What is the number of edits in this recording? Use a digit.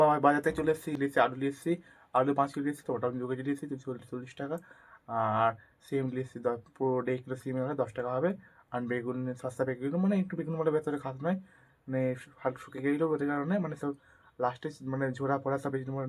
1